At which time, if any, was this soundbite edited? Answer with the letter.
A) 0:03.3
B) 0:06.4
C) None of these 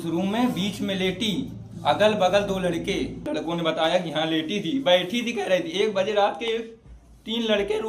A